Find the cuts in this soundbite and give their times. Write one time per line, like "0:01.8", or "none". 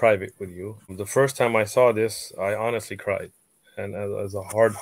0:01.0